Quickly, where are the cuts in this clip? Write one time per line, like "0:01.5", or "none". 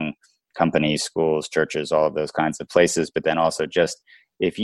none